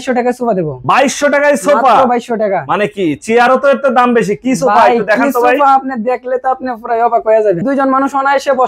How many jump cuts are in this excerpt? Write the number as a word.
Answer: one